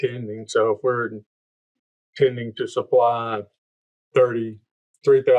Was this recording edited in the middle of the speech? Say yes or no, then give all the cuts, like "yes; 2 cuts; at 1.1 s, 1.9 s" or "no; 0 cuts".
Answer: no; 0 cuts